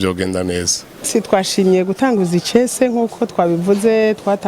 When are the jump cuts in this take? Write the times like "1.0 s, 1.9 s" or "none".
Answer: 1.1 s